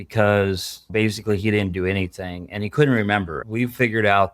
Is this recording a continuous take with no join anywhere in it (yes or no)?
no